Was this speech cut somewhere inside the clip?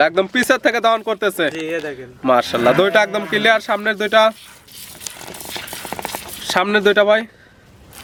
no; 0 cuts

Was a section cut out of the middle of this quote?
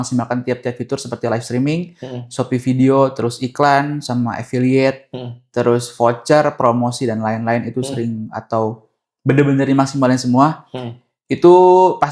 no; 0 cuts

